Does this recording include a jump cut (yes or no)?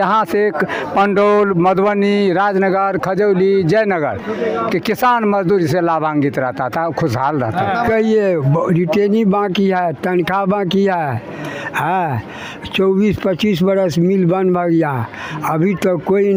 no